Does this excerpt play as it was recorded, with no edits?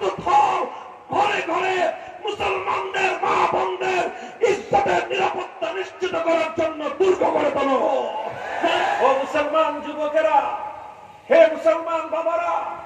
no; 1 cut; at 9.0 s

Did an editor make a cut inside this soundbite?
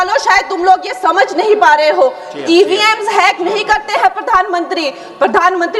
no; 0 cuts

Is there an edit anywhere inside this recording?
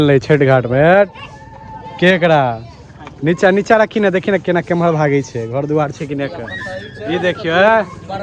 no; 0 cuts

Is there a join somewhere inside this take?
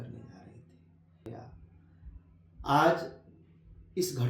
yes; 1 cut; at 1.3 s

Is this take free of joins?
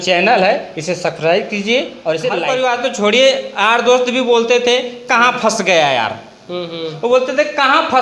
no; 1 cut; at 2.4 s

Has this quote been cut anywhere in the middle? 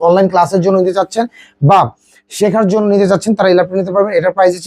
no; 0 cuts

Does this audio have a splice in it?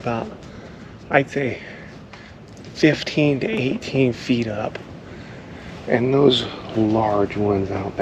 no; 0 cuts

